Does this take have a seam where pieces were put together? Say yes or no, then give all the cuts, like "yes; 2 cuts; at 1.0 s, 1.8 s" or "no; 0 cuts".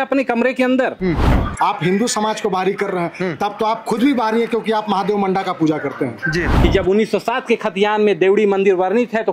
yes; 2 cuts; at 1.3 s, 6.6 s